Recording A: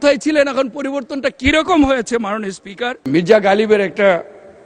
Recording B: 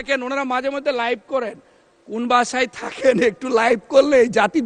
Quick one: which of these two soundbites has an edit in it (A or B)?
A